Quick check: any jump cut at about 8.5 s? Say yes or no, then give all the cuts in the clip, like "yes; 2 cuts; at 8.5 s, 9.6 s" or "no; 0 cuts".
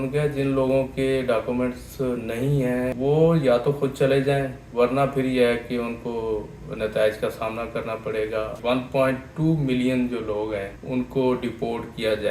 yes; 2 cuts; at 2.9 s, 8.5 s